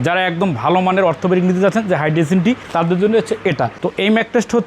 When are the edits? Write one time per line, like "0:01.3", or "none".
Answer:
0:03.8